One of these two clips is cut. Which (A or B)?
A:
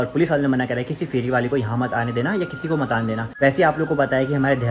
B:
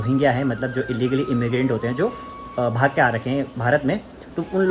A